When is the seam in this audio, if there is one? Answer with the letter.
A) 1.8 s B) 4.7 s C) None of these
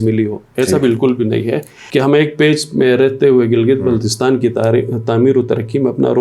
A